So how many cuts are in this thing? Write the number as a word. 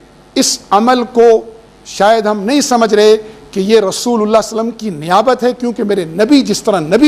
zero